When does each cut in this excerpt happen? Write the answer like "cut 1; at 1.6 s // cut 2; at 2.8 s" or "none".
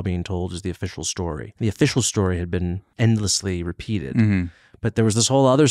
cut 1; at 1.5 s // cut 2; at 2.8 s